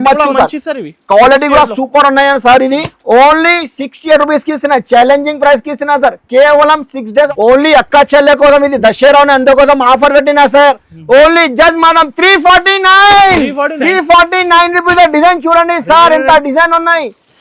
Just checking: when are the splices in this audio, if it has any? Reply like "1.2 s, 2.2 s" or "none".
7.3 s